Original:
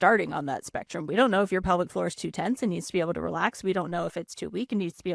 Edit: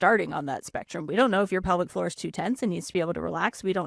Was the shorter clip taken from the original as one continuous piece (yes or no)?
yes